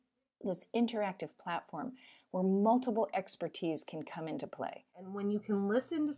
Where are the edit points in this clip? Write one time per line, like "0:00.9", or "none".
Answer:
0:05.1